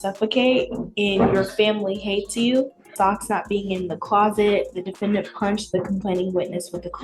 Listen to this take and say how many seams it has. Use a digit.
1